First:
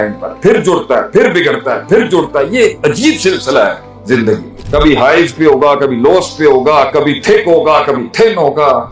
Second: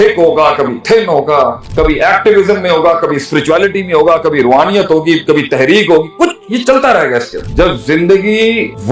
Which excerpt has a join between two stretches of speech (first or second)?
second